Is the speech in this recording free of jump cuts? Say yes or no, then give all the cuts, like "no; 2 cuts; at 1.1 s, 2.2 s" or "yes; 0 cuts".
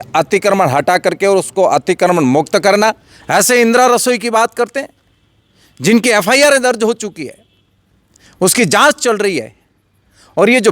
no; 1 cut; at 3.1 s